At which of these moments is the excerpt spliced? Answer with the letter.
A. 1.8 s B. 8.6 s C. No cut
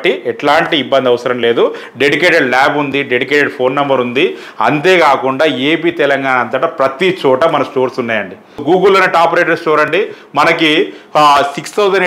B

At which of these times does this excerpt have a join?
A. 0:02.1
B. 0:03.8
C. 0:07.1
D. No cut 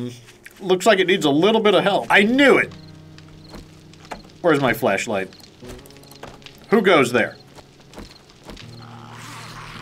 A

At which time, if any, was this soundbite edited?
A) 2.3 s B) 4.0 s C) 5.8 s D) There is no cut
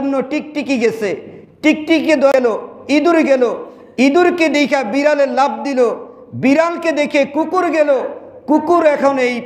A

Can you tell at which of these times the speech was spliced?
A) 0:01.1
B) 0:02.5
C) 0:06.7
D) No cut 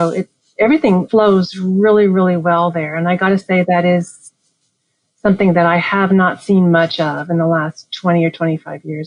A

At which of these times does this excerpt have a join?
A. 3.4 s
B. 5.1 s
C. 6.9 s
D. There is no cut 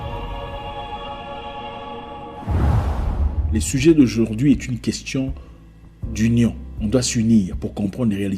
A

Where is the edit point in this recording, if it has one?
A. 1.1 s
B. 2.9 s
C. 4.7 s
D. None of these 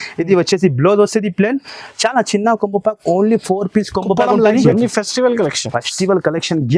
C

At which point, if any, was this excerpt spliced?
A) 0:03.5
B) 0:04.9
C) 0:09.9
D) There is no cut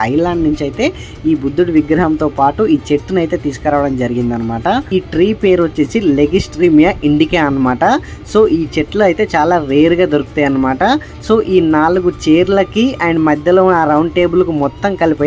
B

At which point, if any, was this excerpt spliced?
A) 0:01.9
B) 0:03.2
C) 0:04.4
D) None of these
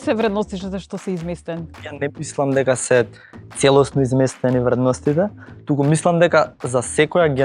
A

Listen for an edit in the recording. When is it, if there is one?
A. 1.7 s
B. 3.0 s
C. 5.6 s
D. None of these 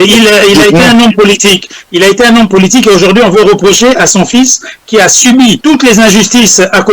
C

